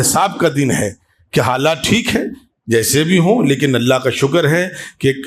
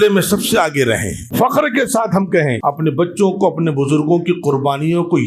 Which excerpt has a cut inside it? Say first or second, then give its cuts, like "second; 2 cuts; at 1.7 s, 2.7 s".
second; 2 cuts; at 1.2 s, 2.6 s